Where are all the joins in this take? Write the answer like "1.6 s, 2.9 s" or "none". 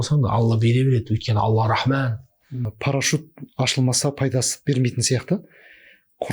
2.7 s